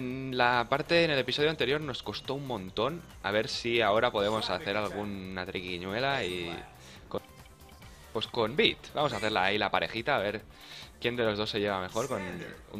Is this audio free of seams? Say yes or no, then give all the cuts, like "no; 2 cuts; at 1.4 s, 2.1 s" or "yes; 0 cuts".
yes; 0 cuts